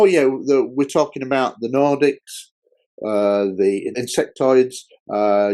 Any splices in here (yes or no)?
yes